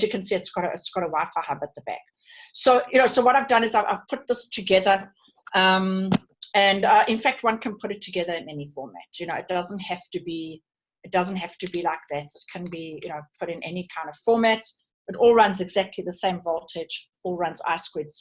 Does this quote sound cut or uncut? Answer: uncut